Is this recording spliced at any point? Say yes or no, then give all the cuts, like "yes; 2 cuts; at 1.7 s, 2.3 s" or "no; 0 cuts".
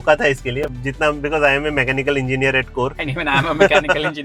no; 0 cuts